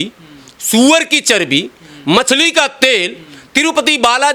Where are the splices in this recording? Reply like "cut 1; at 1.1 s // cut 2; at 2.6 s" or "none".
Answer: none